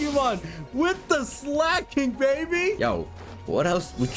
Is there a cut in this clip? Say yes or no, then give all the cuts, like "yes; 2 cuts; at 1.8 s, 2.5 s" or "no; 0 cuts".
yes; 1 cut; at 2.8 s